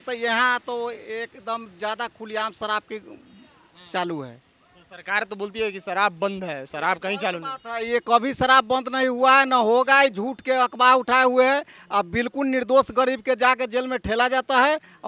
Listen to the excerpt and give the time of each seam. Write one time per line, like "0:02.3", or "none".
none